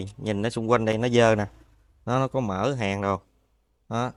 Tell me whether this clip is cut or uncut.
uncut